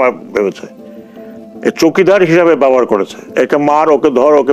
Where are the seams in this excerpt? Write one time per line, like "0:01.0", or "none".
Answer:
none